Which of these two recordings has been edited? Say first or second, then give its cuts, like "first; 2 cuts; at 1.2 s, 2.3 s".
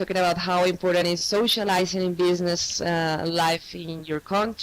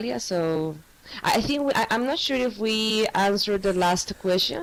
first; 1 cut; at 2.4 s